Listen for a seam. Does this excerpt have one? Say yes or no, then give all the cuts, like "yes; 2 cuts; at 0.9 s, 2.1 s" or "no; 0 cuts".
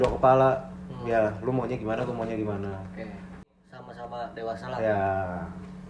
yes; 1 cut; at 3.4 s